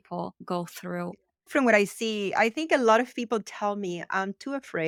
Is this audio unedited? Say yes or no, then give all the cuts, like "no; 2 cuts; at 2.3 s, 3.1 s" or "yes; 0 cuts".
yes; 0 cuts